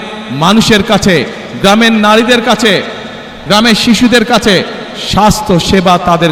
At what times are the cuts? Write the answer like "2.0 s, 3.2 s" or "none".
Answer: none